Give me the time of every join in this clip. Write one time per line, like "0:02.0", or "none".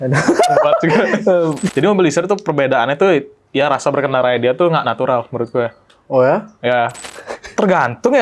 0:01.6
0:07.0